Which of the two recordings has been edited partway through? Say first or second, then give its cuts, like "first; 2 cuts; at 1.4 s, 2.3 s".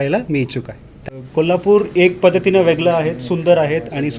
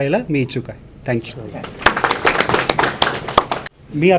first; 1 cut; at 1.0 s